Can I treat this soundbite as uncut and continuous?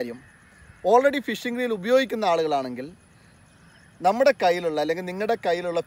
yes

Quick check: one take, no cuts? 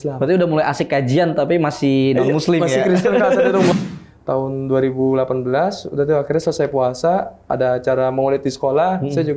no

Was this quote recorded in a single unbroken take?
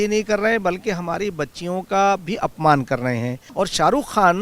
no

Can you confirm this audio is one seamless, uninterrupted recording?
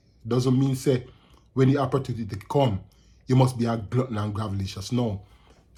yes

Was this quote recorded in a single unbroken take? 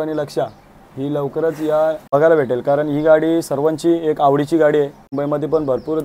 no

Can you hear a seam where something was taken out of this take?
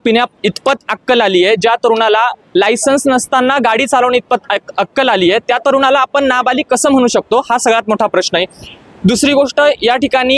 no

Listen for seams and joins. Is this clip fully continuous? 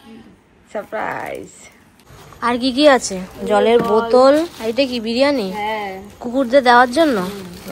no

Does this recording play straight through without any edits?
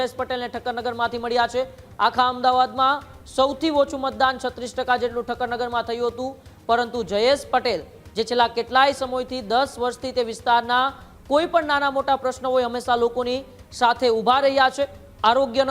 yes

